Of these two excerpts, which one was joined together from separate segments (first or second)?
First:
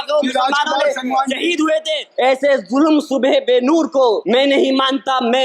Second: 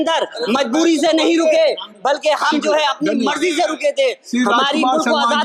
first